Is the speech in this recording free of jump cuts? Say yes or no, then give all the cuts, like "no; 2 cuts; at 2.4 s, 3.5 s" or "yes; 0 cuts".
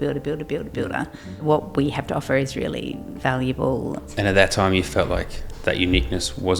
no; 3 cuts; at 1.3 s, 3.1 s, 4.1 s